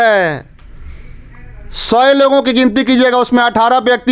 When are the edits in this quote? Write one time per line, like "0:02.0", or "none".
none